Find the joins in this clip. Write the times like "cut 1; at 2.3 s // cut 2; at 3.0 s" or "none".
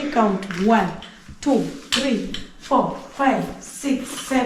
none